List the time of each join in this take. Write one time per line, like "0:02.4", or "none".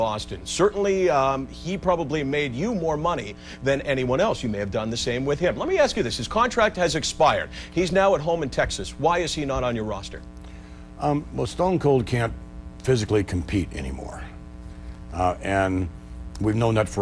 0:04.1